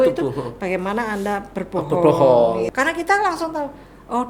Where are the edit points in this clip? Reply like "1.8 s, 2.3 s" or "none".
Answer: 2.7 s

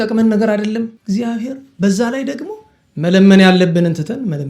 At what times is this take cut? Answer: 1.0 s

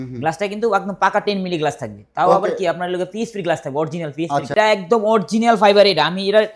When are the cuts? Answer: 4.5 s

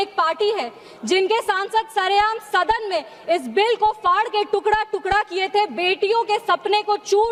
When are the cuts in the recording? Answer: none

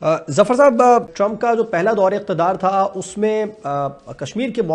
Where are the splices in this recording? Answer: 1.1 s

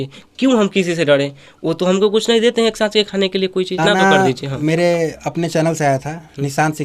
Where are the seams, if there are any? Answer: 3.8 s

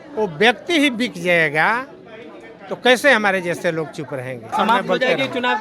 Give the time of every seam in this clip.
4.5 s

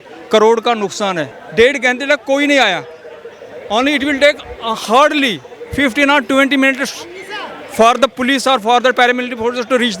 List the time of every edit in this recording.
1.4 s

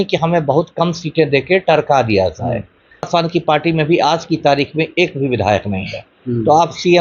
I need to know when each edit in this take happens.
3.1 s

